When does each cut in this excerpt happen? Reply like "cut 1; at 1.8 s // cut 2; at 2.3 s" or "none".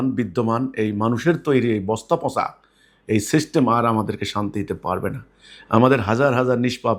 none

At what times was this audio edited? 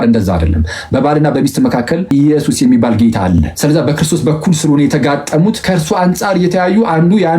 cut 1; at 2.0 s // cut 2; at 3.5 s // cut 3; at 5.6 s

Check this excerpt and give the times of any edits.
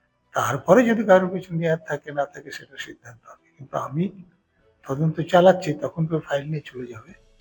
none

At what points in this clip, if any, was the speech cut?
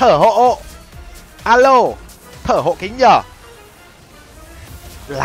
none

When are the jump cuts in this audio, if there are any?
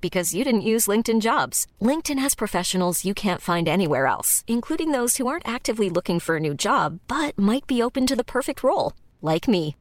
none

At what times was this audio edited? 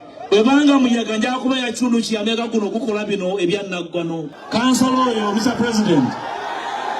cut 1; at 4.4 s

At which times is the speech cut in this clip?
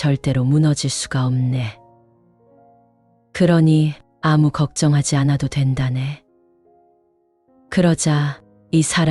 cut 1; at 6.2 s // cut 2; at 7.5 s

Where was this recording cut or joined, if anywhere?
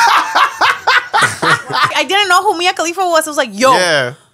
cut 1; at 1.9 s

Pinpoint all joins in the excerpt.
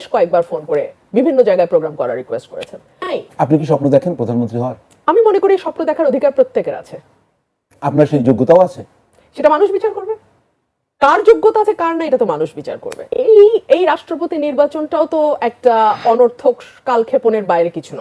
cut 1; at 3.1 s // cut 2; at 13.1 s

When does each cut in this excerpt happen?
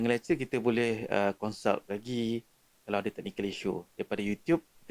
none

